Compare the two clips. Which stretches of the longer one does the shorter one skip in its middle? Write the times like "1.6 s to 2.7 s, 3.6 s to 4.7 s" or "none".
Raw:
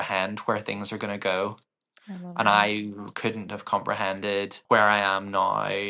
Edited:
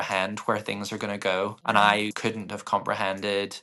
1.6 s to 2.3 s, 2.8 s to 3.1 s